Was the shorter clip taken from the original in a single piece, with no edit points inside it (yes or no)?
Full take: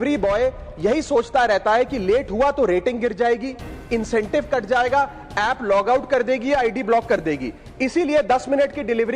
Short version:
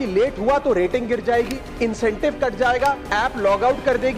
no